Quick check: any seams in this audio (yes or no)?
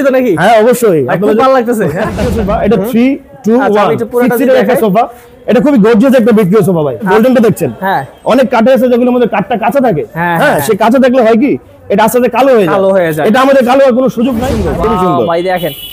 yes